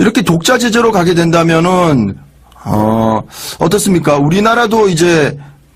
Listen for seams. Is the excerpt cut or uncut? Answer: uncut